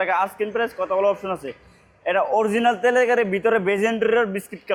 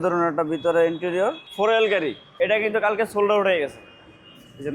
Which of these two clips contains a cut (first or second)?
second